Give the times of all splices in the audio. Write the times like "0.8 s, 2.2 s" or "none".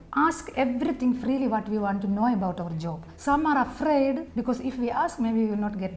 none